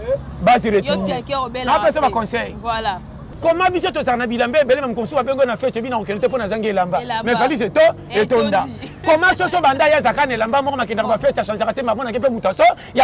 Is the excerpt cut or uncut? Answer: cut